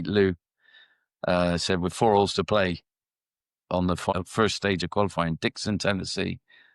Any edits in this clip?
yes; 1 cut; at 4.1 s

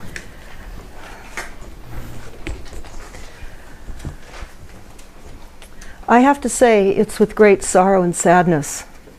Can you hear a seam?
yes; 1 cut; at 2.0 s

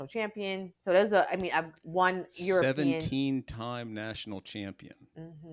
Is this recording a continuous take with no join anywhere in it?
yes; 0 cuts

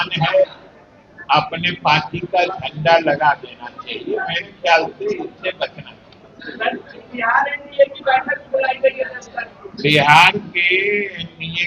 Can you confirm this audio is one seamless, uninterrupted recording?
yes; 0 cuts

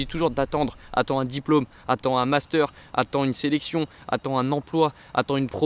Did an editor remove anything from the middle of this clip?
no; 0 cuts

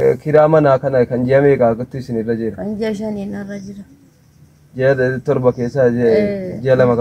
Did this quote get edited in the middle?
no; 0 cuts

